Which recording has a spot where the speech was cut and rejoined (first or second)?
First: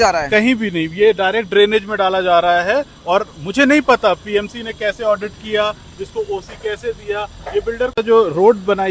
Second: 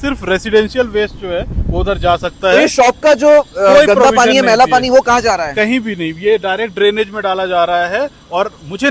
first